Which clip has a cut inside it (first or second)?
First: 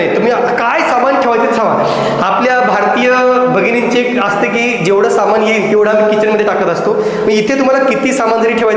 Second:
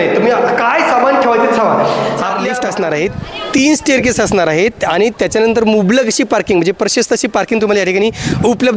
second